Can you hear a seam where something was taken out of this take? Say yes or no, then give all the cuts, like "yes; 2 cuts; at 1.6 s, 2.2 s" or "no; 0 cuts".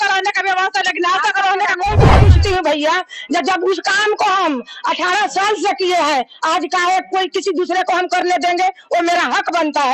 yes; 1 cut; at 2.1 s